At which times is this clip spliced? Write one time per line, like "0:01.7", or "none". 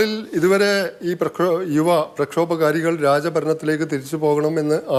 none